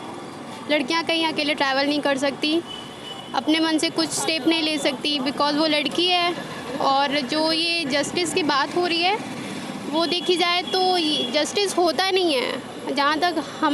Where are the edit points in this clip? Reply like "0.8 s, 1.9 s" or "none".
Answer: none